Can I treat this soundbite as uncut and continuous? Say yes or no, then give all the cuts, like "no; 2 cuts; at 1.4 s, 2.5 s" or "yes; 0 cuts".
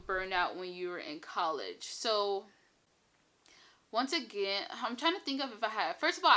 yes; 0 cuts